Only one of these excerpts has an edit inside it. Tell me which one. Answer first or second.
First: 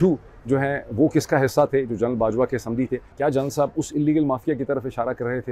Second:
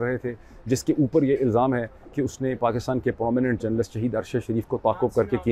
first